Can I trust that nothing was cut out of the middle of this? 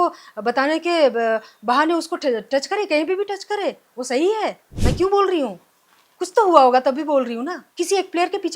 no; 2 cuts; at 4.7 s, 7.6 s

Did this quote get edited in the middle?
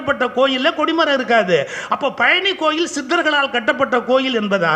no; 0 cuts

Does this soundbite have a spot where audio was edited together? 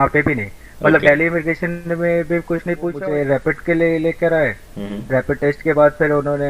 yes; 1 cut; at 2.9 s

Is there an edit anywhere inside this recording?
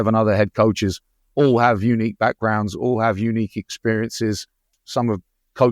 yes; 1 cut; at 4.7 s

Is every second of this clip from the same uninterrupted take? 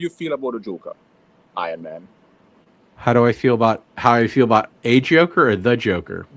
yes; 0 cuts

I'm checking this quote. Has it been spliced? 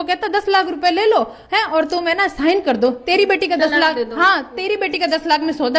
no; 0 cuts

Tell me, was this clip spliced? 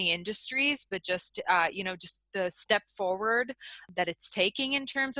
yes; 1 cut; at 3.8 s

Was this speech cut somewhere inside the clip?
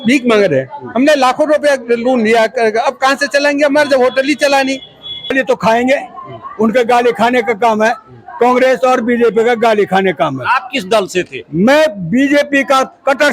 yes; 1 cut; at 5.3 s

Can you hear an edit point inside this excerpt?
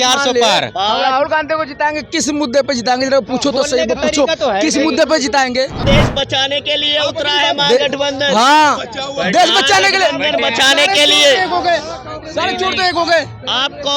yes; 1 cut; at 5.8 s

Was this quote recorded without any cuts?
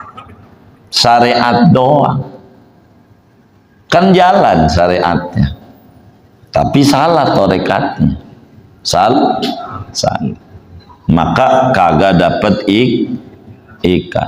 yes; 0 cuts

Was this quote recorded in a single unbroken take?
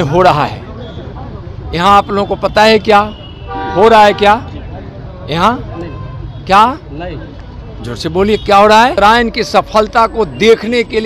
no; 1 cut; at 9.0 s

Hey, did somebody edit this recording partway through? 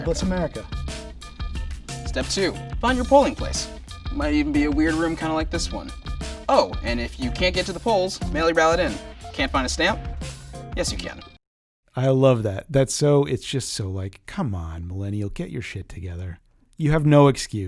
no; 0 cuts

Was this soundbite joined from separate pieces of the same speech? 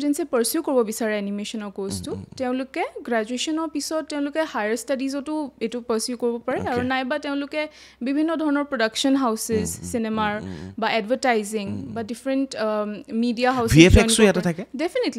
no; 0 cuts

